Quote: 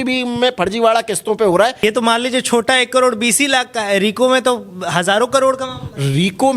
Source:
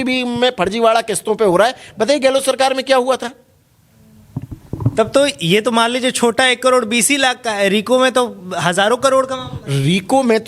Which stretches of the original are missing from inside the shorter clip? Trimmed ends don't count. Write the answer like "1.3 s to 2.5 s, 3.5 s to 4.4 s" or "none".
1.8 s to 5.5 s